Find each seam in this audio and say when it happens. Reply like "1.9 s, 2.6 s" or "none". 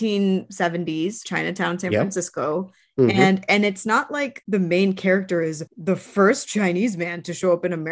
1.2 s, 4.3 s, 5.7 s